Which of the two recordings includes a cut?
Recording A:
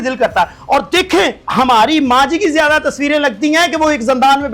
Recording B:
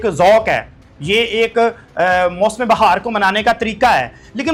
A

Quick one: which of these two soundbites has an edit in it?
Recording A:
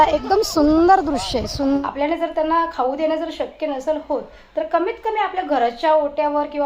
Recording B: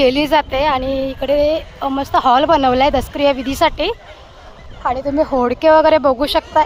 A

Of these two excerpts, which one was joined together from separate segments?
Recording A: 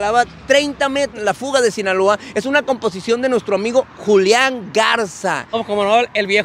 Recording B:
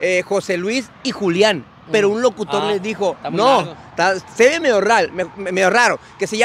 A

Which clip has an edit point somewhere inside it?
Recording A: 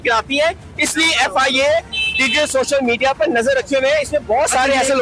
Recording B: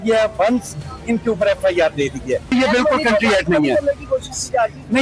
B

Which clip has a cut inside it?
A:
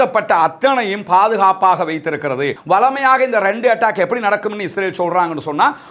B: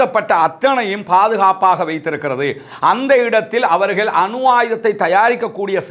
A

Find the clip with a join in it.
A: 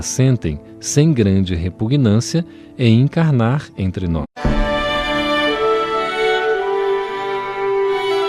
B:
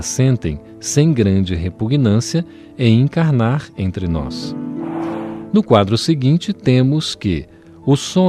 B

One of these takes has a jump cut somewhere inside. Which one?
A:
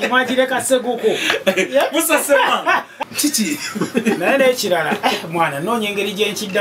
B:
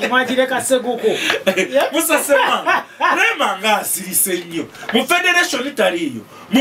A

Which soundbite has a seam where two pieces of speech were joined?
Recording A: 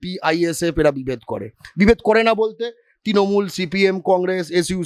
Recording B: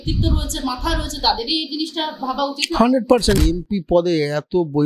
B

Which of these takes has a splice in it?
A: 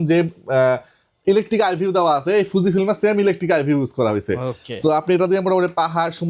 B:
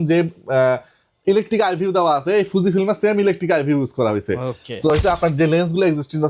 B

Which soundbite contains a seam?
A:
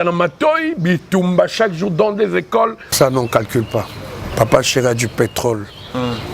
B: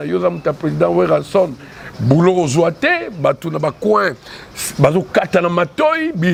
A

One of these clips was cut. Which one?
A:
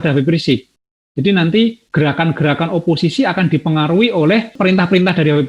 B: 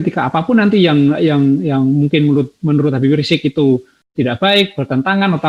A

